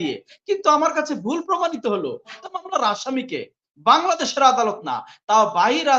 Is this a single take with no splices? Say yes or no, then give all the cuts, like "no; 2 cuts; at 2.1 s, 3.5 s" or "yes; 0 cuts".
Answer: no; 1 cut; at 2.4 s